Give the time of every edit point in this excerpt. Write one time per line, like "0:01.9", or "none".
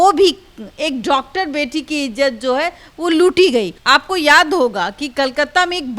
0:03.8